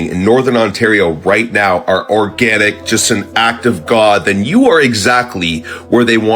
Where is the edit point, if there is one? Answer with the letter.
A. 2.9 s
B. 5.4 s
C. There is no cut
C